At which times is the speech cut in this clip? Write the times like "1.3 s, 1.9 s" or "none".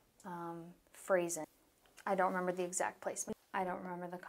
1.4 s, 3.3 s